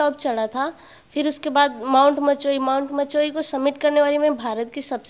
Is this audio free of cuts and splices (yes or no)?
yes